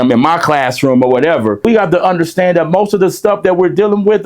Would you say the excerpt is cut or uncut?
cut